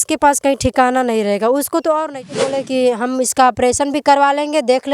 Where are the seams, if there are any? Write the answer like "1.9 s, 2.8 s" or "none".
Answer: 2.2 s